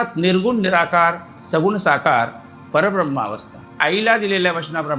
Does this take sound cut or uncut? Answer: cut